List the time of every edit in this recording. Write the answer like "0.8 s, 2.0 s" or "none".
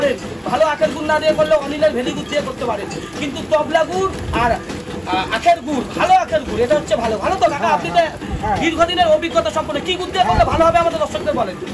none